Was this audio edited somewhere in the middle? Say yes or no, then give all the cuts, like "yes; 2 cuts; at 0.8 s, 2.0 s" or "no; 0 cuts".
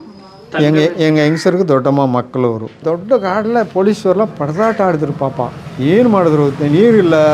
yes; 1 cut; at 2.8 s